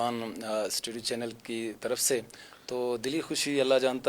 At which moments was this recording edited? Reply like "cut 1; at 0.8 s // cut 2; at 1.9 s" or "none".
none